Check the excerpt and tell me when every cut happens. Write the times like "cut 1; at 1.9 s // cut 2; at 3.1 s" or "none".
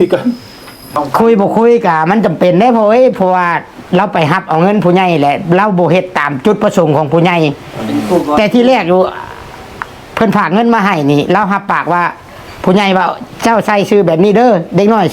cut 1; at 0.9 s